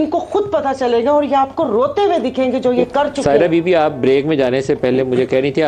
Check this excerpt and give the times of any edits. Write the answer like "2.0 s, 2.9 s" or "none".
3.1 s

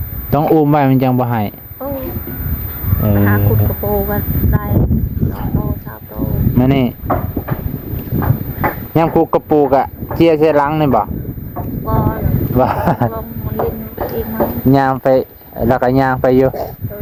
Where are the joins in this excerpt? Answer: none

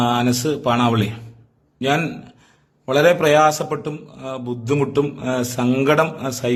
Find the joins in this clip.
none

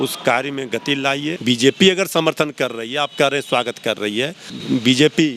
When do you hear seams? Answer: 1.4 s, 4.5 s

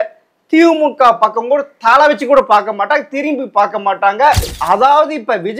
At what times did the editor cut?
4.5 s

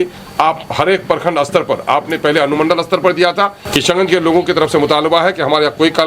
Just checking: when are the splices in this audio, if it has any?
3.6 s

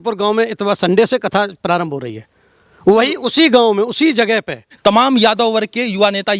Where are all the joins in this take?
4.7 s

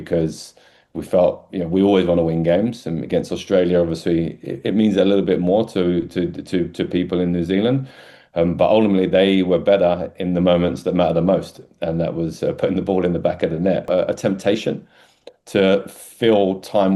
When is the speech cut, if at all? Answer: 13.9 s

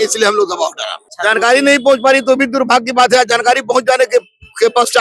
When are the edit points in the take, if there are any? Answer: 1.1 s

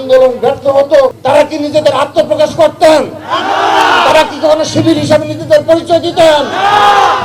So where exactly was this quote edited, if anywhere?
1.2 s

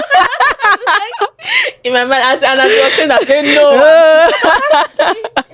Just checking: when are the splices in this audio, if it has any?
none

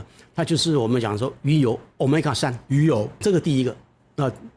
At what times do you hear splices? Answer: 3.2 s

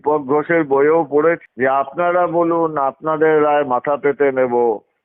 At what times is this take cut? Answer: 1.4 s

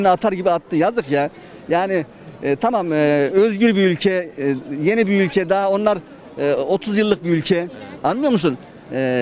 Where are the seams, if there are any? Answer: none

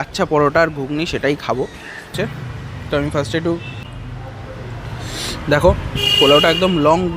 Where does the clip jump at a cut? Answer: 2.1 s

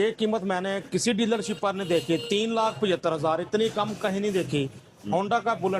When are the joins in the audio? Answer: none

